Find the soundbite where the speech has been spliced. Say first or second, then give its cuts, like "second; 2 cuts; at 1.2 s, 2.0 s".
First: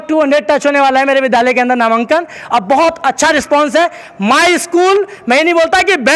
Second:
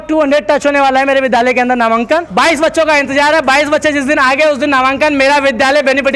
second; 1 cut; at 2.3 s